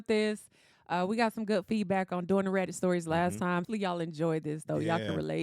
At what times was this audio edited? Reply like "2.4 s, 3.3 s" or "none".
3.7 s